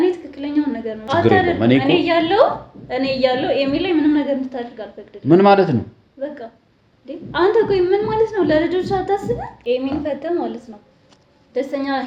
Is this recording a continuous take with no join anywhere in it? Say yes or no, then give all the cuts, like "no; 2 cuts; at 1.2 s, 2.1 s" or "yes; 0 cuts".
no; 2 cuts; at 0.9 s, 9.5 s